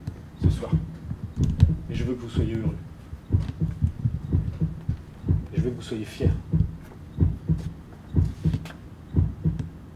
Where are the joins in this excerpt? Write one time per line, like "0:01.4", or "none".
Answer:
none